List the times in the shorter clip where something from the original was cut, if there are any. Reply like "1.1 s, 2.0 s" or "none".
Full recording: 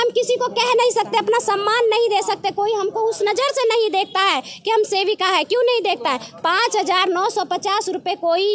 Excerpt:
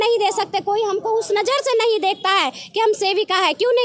none